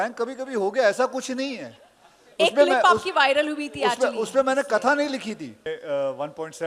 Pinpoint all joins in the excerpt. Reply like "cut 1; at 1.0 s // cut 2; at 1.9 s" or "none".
cut 1; at 5.7 s